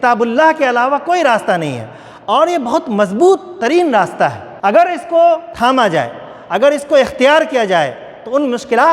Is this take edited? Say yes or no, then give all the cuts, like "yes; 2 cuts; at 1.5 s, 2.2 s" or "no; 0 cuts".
yes; 2 cuts; at 4.5 s, 5.5 s